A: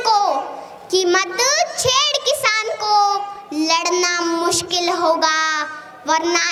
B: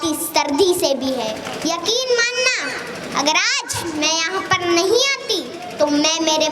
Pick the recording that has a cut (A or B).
B